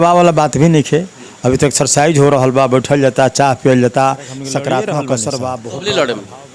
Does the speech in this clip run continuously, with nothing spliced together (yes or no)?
no